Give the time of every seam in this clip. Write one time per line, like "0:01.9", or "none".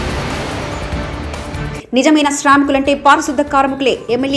0:01.4